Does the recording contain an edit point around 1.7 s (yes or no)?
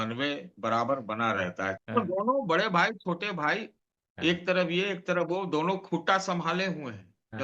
yes